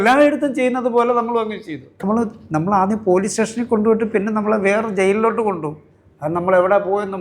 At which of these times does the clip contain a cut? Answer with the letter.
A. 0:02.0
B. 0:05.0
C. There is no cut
A